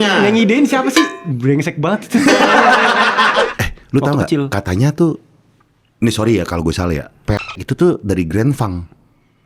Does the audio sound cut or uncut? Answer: cut